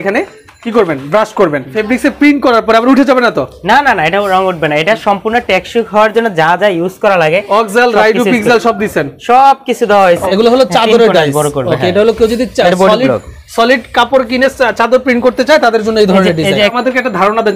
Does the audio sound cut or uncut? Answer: cut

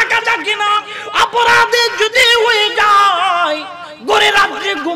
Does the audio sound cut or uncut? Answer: cut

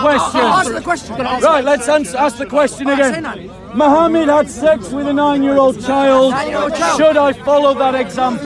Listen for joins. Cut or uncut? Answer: uncut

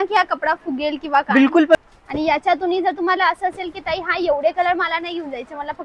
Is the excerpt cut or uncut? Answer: cut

